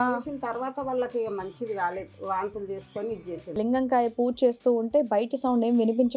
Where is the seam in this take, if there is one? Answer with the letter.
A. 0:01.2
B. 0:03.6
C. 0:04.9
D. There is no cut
B